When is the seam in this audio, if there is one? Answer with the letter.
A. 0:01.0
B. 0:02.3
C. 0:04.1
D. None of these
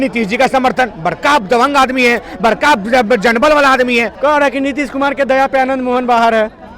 C